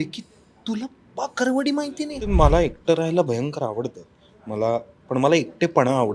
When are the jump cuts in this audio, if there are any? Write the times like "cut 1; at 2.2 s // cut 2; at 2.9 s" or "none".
cut 1; at 2.3 s